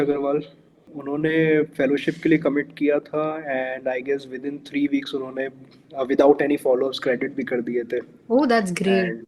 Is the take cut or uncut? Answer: cut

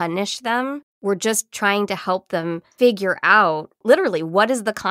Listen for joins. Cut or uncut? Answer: cut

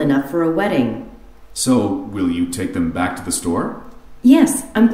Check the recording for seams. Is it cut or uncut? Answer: cut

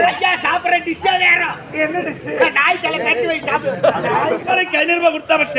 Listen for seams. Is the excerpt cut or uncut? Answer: cut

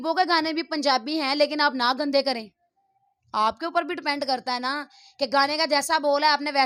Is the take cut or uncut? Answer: uncut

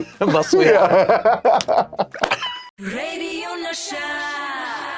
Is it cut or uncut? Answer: cut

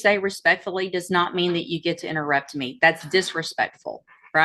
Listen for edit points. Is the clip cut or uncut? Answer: uncut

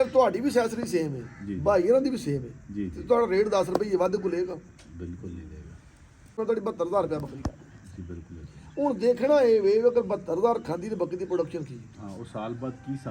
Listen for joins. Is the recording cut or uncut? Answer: cut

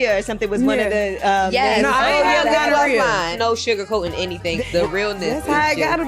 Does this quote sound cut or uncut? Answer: cut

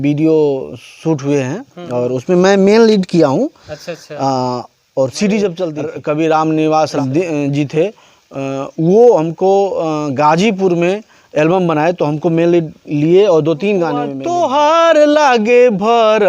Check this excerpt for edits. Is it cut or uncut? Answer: cut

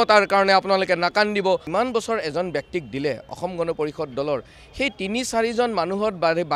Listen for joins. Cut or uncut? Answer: cut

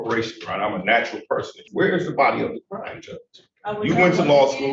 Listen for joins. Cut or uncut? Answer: cut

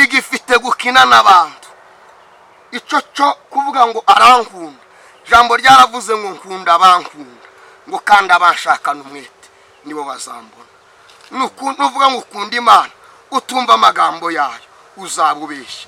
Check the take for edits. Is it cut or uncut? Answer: uncut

